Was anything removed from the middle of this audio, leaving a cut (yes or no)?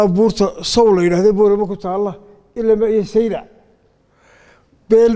no